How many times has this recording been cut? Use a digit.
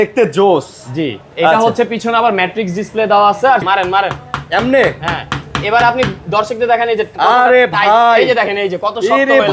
1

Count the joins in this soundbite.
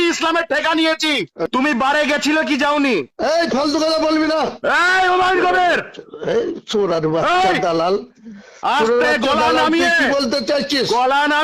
1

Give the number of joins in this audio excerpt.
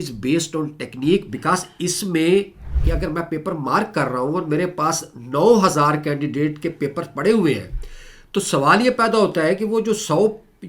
1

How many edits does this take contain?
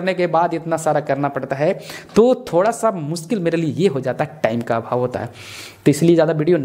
0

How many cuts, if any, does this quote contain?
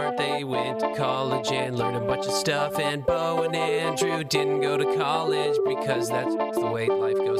0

